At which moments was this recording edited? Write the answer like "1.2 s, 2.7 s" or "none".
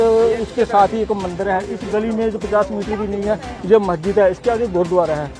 none